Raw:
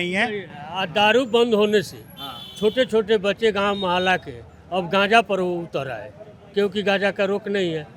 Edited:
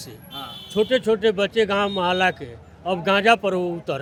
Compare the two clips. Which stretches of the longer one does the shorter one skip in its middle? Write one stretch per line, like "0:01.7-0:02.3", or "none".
none